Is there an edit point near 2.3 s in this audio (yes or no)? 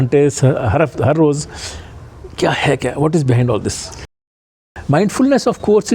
no